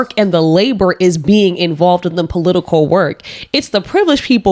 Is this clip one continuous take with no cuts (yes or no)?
yes